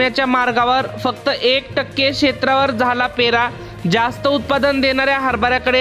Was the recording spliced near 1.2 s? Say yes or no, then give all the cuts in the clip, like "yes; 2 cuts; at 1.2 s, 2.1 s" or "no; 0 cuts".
no; 0 cuts